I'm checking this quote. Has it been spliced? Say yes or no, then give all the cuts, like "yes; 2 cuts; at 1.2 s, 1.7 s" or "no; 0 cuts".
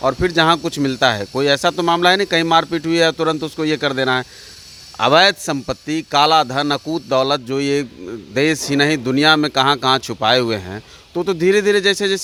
no; 0 cuts